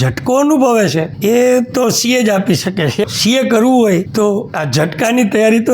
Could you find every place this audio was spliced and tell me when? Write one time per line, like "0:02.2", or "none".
0:01.1
0:03.1
0:04.3